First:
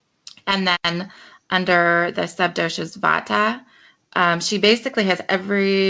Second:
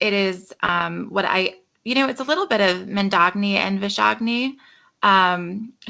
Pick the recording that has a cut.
second; 1 cut; at 3.2 s

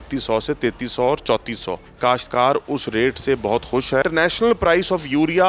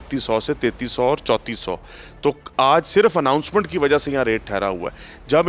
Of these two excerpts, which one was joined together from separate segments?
first; 2 cuts; at 1.8 s, 4.0 s

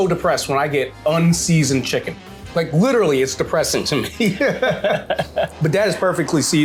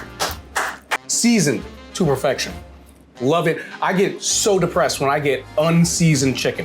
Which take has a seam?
second; 1 cut; at 1.0 s

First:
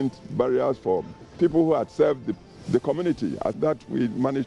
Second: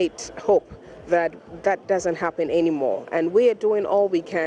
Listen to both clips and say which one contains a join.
first; 1 cut; at 3.6 s

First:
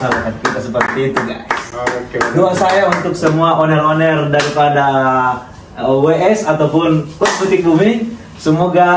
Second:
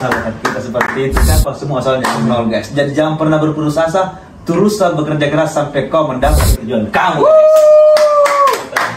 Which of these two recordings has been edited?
second; 2 cuts; at 1.4 s, 6.5 s

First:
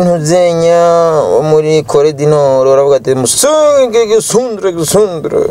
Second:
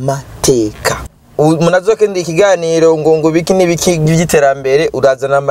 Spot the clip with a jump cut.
second; 1 cut; at 1.2 s

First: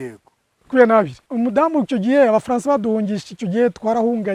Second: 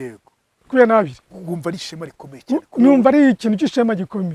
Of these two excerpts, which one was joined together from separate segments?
first; 1 cut; at 1.2 s

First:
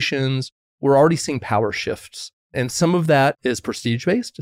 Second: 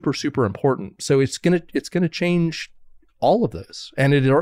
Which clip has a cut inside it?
first; 3 cuts; at 0.8 s, 2.4 s, 3.4 s

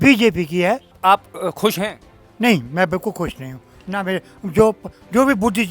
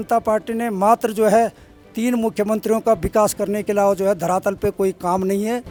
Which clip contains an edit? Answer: first; 1 cut; at 1.0 s

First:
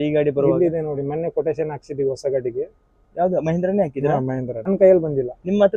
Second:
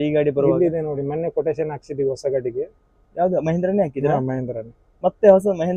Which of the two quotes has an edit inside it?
first; 1 cut; at 4.6 s

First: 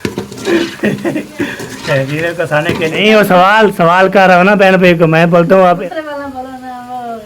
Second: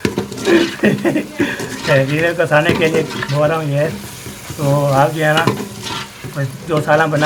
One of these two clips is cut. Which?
first; 2 cuts; at 3.0 s, 5.8 s

